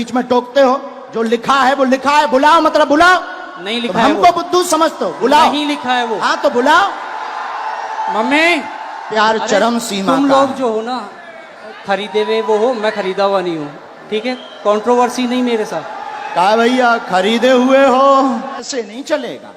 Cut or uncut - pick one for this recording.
cut